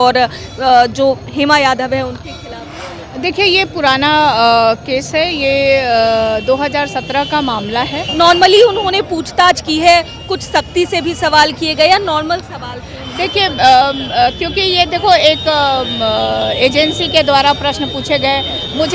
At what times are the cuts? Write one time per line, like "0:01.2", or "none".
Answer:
0:08.1

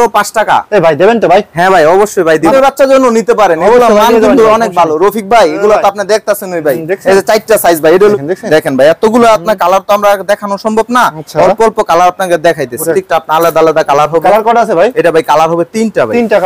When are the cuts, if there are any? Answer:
0:02.5
0:08.2
0:12.9

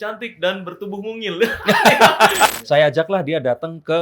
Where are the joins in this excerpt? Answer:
0:02.5

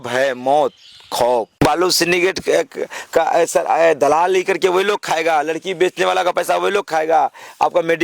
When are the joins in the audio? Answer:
0:01.6

